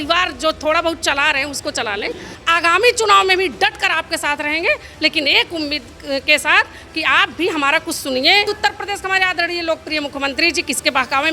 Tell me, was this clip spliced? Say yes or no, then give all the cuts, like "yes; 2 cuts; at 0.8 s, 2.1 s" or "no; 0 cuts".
yes; 2 cuts; at 2.3 s, 8.5 s